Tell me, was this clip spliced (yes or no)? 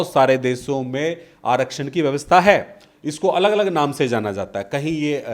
no